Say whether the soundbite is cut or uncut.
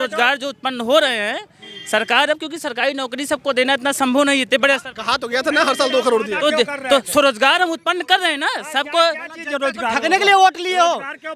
uncut